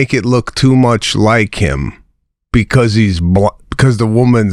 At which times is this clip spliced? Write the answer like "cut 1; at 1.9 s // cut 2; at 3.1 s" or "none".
none